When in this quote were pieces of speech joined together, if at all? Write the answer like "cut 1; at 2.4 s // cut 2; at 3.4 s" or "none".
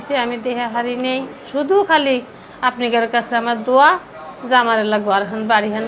cut 1; at 1.4 s